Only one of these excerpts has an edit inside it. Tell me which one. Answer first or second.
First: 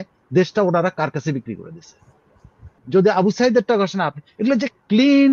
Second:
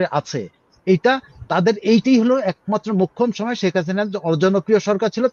first